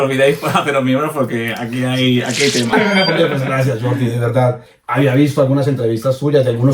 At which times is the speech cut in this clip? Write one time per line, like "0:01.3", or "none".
0:02.7
0:04.7